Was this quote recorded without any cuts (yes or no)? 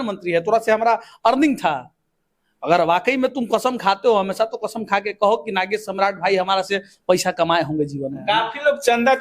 no